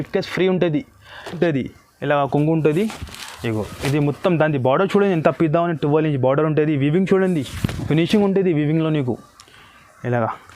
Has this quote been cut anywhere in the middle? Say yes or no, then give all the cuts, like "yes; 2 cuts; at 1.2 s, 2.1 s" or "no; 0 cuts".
yes; 1 cut; at 1.4 s